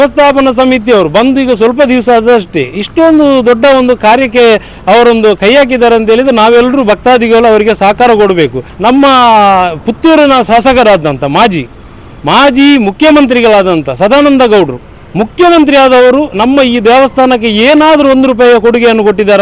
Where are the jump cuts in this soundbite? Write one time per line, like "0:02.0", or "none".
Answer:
0:08.7